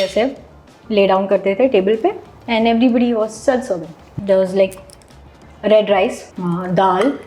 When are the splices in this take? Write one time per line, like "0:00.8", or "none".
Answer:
0:04.1
0:06.3